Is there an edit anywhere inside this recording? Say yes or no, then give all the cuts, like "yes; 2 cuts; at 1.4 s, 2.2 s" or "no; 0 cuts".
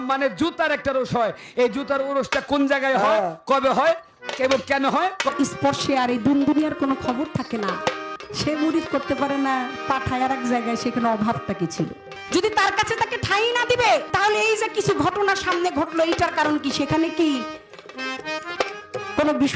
yes; 4 cuts; at 5.3 s, 8.1 s, 12.1 s, 14.1 s